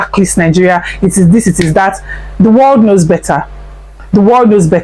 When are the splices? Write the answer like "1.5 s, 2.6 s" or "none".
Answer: none